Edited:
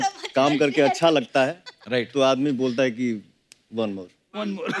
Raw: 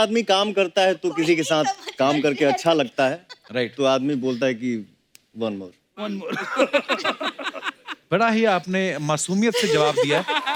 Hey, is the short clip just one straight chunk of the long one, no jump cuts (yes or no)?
yes